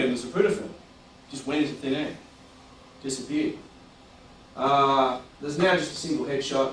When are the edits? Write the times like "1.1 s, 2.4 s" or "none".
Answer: 3.2 s